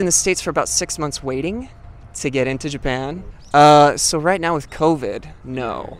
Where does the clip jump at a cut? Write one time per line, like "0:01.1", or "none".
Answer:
0:03.3